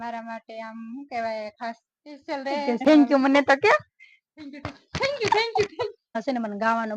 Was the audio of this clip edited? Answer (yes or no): yes